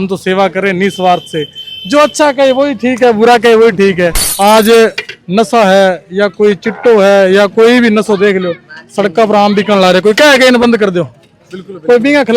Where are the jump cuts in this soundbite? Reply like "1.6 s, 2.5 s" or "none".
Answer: 4.2 s